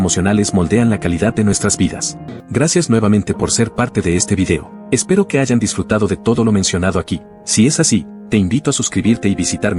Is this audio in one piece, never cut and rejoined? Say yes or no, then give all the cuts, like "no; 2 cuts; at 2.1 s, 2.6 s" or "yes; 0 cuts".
no; 1 cut; at 2.3 s